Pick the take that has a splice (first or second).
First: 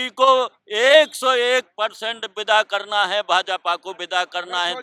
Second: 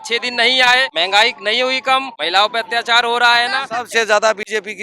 second